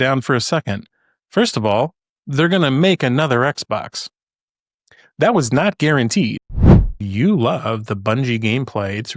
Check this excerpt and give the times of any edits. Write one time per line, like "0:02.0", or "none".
0:06.9